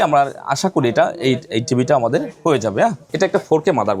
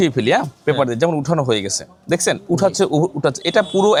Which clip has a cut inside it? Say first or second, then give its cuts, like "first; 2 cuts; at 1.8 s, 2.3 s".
first; 1 cut; at 3.0 s